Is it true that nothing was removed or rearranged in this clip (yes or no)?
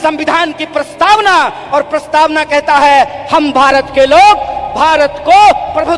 yes